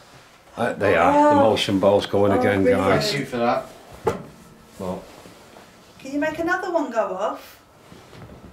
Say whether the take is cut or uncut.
uncut